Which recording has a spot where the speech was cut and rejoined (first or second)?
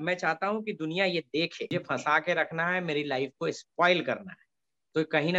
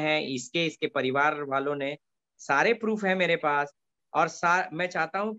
first